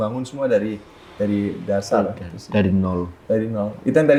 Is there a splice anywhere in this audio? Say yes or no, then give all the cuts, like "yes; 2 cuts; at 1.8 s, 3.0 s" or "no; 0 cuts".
no; 0 cuts